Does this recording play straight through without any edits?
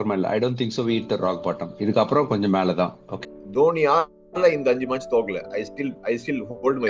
no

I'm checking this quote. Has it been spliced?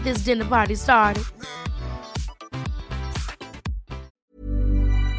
yes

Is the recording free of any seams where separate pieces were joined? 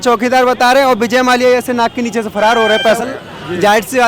no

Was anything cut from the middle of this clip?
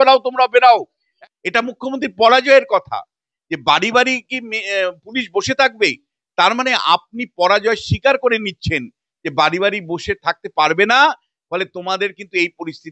yes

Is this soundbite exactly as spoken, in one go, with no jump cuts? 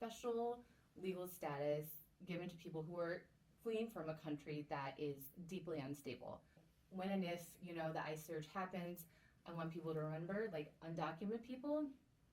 no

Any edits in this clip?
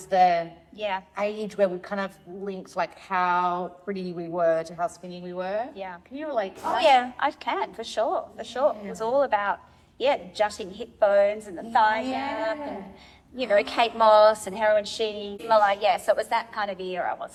no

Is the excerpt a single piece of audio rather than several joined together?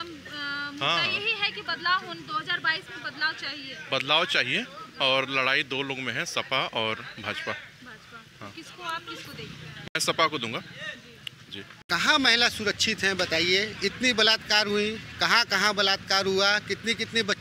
no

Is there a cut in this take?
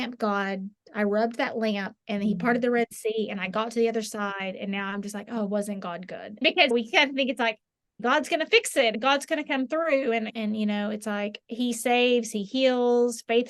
yes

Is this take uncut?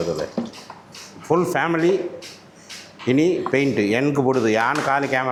yes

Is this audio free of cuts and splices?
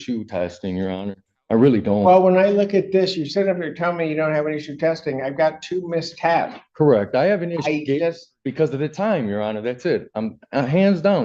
yes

